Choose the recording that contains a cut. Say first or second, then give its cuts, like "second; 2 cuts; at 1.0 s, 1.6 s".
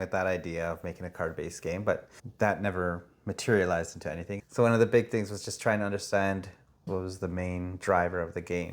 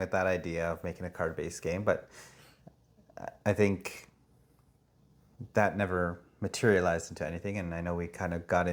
first; 3 cuts; at 2.2 s, 4.4 s, 6.9 s